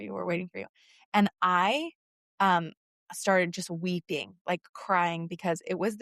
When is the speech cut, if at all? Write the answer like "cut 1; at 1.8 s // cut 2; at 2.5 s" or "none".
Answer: none